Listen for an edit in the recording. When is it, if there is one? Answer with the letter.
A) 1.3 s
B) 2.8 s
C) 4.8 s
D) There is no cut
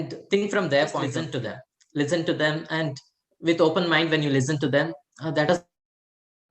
A